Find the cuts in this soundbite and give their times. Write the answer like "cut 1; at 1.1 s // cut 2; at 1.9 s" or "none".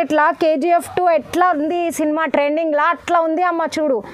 none